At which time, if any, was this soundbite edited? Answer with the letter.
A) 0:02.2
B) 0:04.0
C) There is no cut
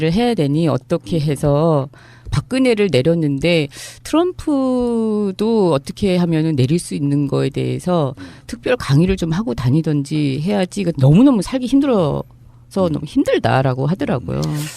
A